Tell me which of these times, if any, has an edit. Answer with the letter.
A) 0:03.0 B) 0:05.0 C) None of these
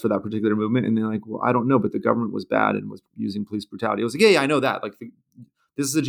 A